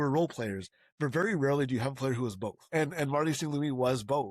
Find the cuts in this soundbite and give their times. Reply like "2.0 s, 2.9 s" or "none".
2.6 s

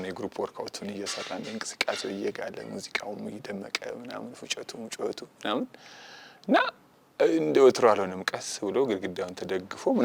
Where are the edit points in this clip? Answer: none

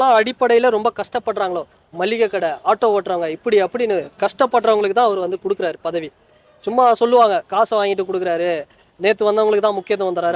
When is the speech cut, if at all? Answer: none

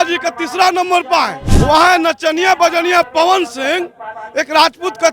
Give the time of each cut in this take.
1.4 s

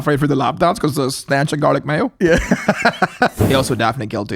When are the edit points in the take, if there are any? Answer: 3.4 s

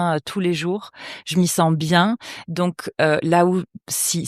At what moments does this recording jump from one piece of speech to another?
none

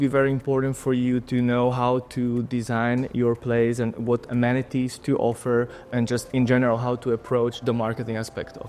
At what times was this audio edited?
5.0 s, 7.6 s

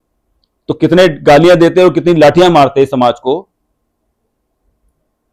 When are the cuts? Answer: none

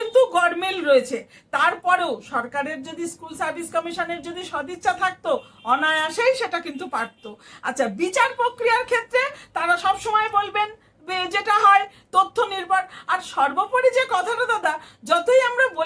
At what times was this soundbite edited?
none

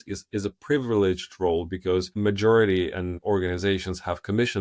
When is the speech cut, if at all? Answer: 2.1 s, 3.1 s

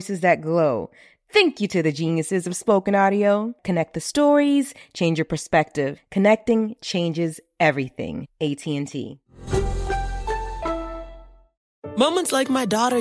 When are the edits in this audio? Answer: 11.6 s

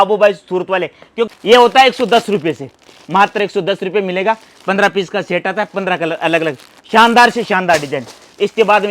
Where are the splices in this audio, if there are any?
1.2 s

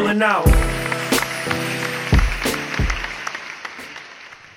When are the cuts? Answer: none

